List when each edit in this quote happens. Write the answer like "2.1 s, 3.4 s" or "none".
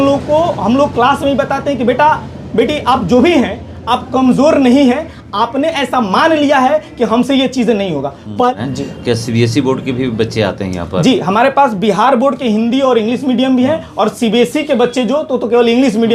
8.5 s